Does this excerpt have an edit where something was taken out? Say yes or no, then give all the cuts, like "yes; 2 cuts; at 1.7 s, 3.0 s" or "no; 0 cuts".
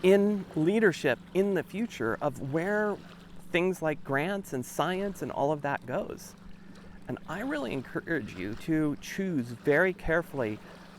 no; 0 cuts